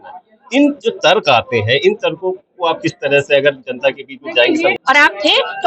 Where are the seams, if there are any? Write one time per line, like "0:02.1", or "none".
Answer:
0:04.8